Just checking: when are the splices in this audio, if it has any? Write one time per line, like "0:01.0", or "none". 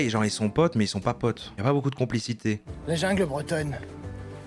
0:02.7